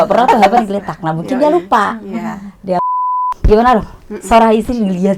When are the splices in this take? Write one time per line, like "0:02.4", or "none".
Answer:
0:02.8